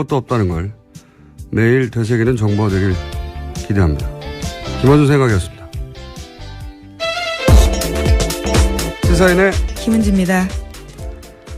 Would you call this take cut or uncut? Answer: cut